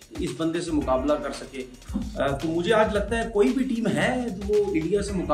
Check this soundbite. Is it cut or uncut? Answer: uncut